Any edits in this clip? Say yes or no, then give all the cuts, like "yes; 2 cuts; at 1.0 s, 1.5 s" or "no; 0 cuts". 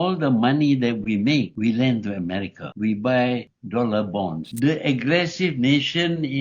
yes; 1 cut; at 4.4 s